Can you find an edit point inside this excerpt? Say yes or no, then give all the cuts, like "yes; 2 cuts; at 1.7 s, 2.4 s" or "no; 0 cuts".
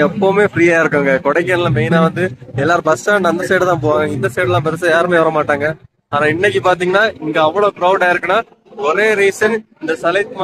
no; 0 cuts